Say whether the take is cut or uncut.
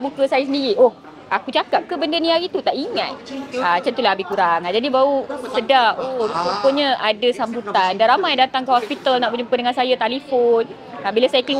uncut